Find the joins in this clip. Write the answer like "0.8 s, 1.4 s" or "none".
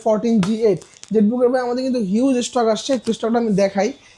none